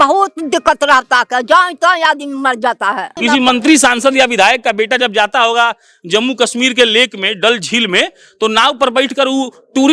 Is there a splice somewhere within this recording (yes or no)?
yes